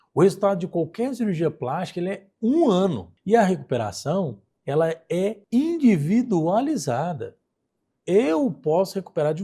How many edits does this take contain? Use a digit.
2